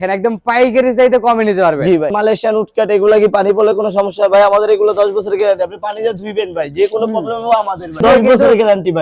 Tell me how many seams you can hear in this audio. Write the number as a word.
two